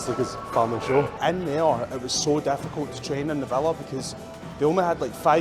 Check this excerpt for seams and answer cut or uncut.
cut